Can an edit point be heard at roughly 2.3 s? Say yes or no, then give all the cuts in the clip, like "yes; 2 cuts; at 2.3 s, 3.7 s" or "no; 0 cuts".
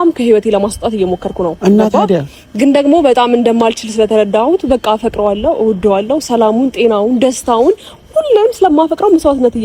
no; 0 cuts